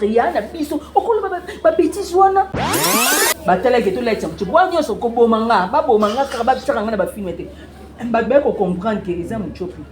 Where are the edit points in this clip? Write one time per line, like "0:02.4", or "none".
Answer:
0:03.1